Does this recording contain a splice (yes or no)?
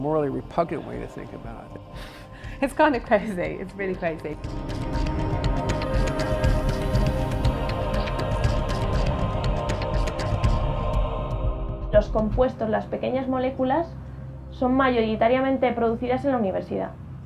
yes